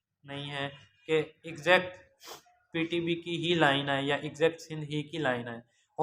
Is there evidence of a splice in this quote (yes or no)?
no